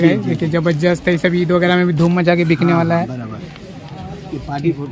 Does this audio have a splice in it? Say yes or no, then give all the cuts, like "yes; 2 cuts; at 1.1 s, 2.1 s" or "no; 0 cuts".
no; 0 cuts